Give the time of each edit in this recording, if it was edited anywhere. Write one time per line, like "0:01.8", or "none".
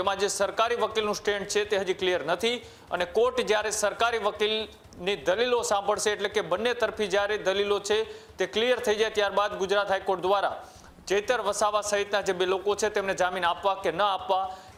none

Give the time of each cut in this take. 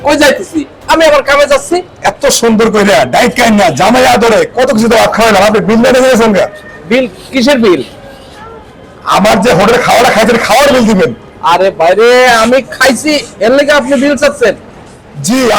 none

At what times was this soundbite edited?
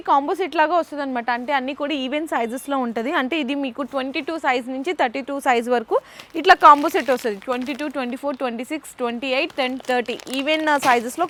none

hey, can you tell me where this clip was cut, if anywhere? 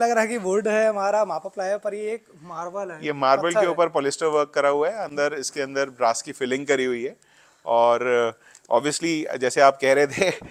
none

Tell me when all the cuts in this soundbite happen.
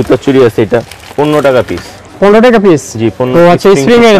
0:03.3

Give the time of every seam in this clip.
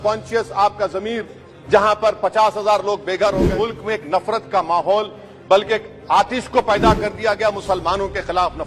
0:03.5

